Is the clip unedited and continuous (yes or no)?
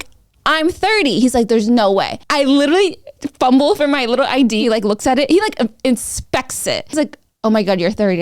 no